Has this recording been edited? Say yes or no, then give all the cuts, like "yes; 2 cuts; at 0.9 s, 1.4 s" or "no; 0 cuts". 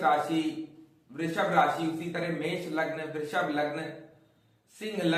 no; 0 cuts